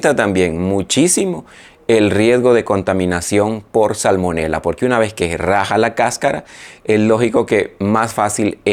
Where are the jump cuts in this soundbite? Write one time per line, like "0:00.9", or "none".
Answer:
none